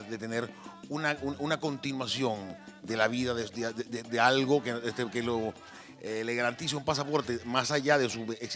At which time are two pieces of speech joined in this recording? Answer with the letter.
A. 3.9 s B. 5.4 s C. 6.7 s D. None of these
C